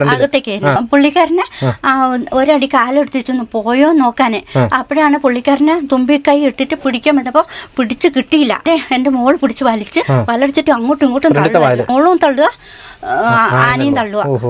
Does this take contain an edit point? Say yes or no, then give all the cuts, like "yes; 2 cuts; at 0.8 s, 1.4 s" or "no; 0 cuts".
yes; 4 cuts; at 0.8 s, 8.7 s, 10.1 s, 11.9 s